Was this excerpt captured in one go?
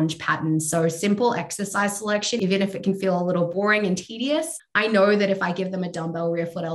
no; 3 cuts; at 2.4 s, 3.5 s, 4.6 s

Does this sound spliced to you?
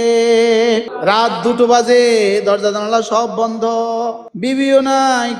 yes; 2 cuts; at 0.9 s, 4.3 s

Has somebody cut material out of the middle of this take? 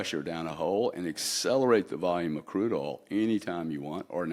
no; 0 cuts

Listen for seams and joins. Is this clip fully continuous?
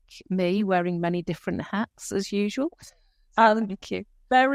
yes; 0 cuts

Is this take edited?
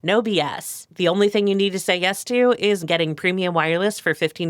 yes; 1 cut; at 2.8 s

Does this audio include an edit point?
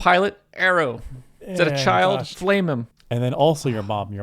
yes; 1 cut; at 3.0 s

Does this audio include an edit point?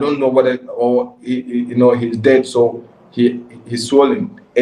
no; 0 cuts

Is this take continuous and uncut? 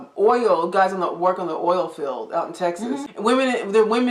no; 1 cut; at 3.1 s

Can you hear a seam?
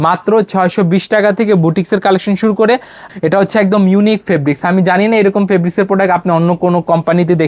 yes; 1 cut; at 3.0 s

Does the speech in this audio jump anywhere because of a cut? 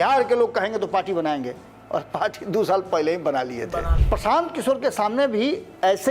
yes; 1 cut; at 4.0 s

